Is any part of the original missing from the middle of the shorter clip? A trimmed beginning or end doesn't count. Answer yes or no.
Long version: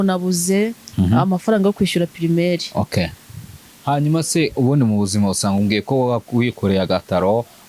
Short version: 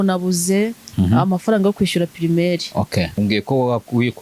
yes